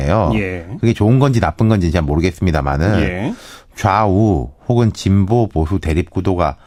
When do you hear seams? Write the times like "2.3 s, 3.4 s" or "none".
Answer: none